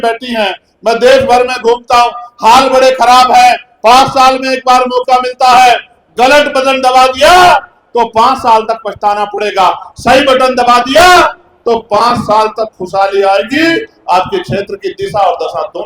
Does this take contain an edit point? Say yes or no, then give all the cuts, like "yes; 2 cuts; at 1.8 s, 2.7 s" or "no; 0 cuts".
no; 0 cuts